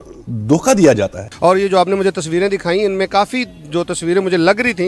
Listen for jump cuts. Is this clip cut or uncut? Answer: cut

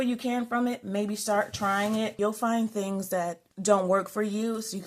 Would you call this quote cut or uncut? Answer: cut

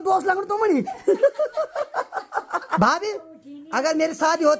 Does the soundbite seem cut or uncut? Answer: cut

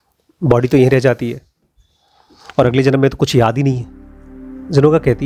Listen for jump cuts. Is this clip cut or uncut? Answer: uncut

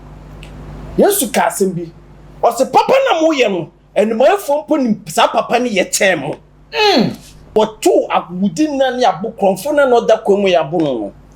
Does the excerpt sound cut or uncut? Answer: cut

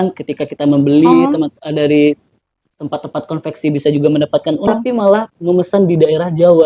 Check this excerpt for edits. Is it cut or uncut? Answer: cut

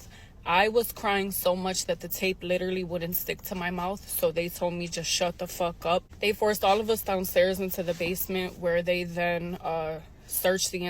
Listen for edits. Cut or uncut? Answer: cut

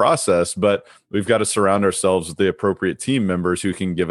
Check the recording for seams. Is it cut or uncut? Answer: uncut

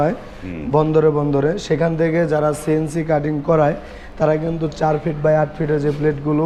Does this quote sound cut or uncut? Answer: uncut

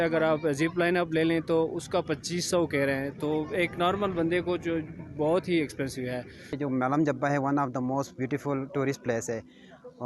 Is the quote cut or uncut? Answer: cut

